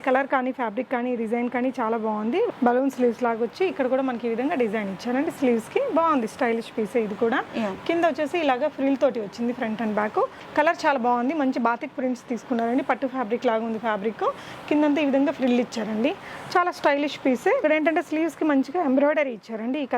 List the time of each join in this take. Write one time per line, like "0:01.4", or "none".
0:02.5
0:10.4
0:17.6